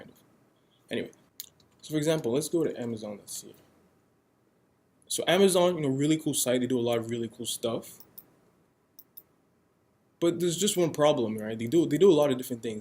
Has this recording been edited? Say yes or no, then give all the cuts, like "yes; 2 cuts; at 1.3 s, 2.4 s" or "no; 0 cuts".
yes; 1 cut; at 1.2 s